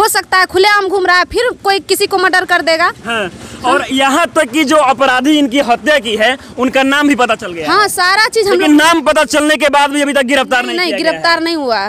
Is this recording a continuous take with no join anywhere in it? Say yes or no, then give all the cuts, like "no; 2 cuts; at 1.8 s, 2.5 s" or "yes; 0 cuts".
yes; 0 cuts